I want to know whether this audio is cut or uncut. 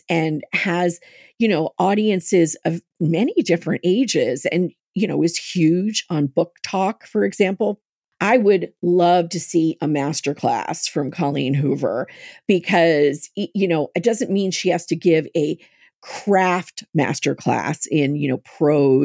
cut